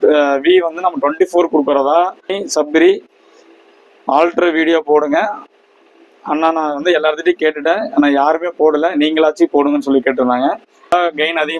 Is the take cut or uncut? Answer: cut